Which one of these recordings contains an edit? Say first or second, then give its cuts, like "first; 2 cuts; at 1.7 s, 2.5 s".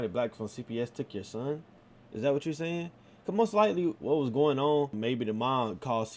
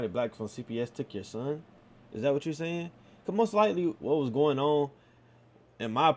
first; 1 cut; at 4.9 s